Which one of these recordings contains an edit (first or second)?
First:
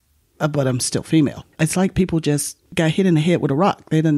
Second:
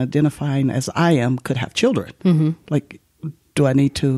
first